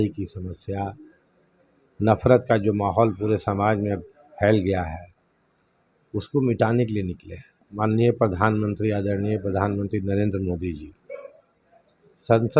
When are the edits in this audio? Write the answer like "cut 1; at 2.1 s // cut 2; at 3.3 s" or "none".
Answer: cut 1; at 7.6 s